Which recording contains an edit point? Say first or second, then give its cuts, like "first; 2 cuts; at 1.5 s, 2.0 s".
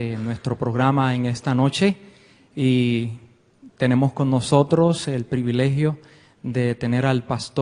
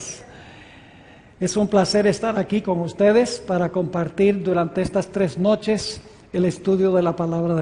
second; 1 cut; at 5.3 s